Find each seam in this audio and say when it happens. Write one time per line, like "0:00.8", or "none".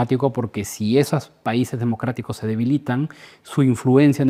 none